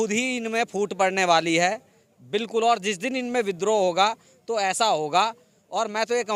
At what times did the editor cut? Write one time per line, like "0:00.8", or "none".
none